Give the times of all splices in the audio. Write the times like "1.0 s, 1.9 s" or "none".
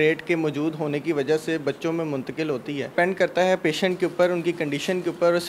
2.9 s